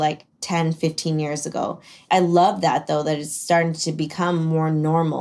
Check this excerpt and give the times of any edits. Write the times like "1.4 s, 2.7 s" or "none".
2.0 s